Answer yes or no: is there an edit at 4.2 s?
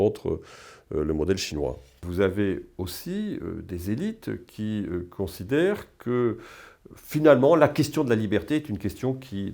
no